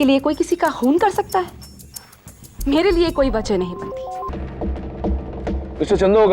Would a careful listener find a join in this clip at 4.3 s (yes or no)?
yes